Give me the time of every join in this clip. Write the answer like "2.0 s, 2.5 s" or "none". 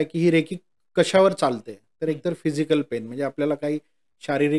none